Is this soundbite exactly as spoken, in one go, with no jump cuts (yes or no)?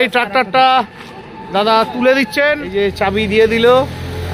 no